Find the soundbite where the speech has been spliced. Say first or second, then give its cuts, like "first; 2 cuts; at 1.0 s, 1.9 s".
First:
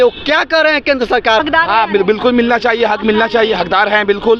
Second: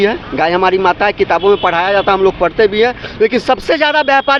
first; 1 cut; at 1.4 s